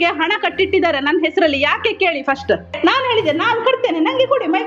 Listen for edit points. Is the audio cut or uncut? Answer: cut